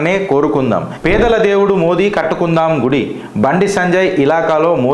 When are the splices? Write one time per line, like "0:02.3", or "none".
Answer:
0:00.9